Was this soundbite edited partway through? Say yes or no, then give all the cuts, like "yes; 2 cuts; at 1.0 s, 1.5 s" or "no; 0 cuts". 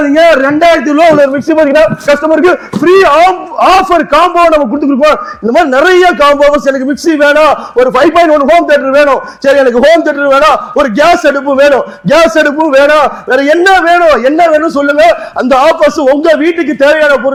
no; 0 cuts